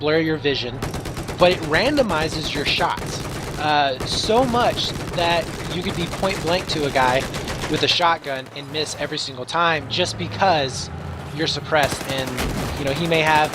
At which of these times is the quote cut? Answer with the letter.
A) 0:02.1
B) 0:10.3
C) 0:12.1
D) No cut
C